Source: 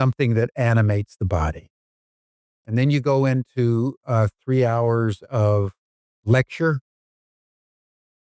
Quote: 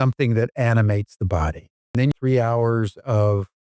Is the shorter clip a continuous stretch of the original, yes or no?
no